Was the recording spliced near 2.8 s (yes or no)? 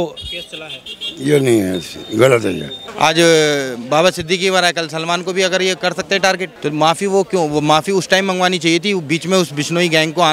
yes